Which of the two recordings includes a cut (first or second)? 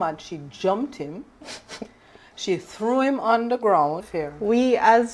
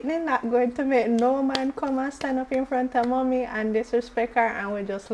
first